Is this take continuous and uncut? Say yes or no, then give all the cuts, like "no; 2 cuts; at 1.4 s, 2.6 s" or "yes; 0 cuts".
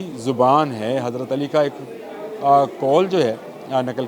yes; 0 cuts